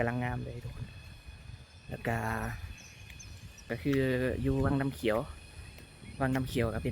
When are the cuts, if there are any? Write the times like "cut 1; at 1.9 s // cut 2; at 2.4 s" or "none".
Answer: cut 1; at 3.7 s